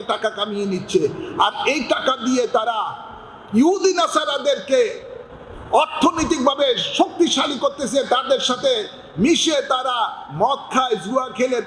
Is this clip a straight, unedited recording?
yes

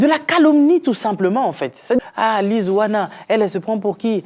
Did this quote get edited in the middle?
yes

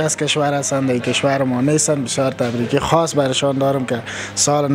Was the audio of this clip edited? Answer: no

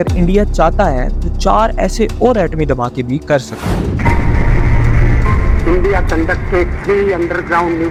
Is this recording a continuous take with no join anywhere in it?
yes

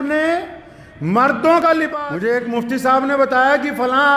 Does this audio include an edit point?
yes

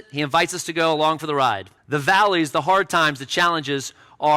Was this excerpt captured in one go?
no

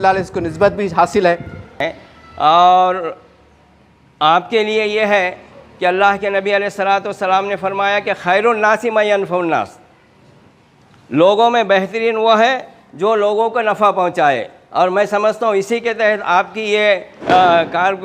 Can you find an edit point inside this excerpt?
yes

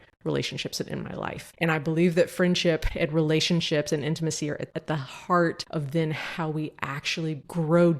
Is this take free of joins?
no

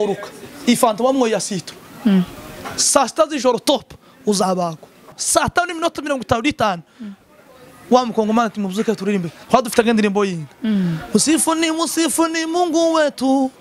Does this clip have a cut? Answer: yes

